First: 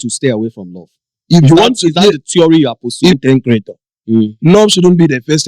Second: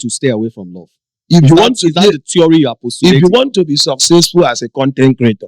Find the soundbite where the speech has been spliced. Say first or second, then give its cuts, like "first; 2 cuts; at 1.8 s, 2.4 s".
first; 1 cut; at 3.1 s